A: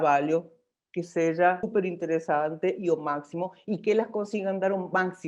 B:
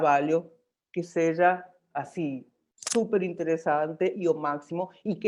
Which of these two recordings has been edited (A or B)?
A